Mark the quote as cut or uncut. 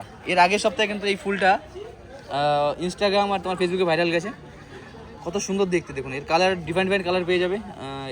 uncut